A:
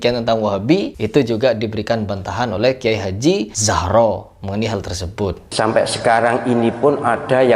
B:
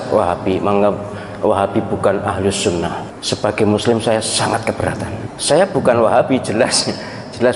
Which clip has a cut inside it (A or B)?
A